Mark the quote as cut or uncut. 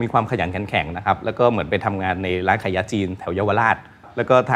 uncut